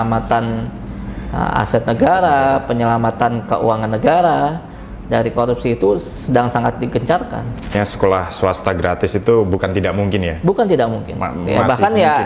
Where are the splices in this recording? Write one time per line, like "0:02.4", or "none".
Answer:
0:07.8

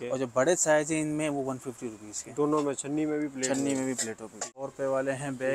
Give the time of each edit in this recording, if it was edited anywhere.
0:04.5

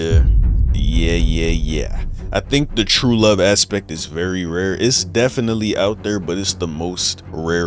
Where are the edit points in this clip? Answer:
none

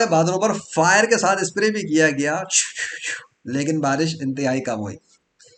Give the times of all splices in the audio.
none

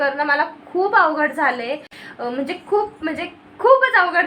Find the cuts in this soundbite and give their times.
none

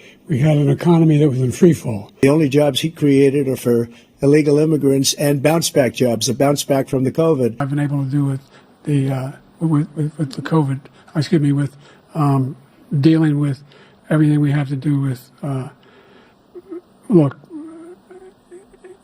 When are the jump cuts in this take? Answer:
0:02.2
0:07.7

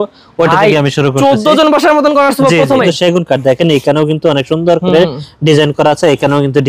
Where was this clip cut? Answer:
0:02.8

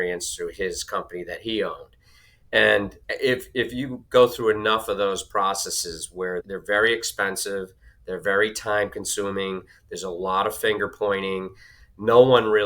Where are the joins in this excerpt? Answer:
0:03.0
0:06.4

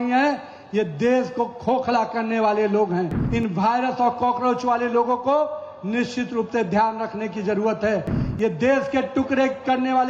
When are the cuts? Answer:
0:03.2

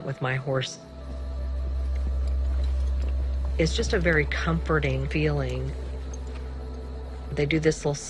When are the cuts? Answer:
0:06.7

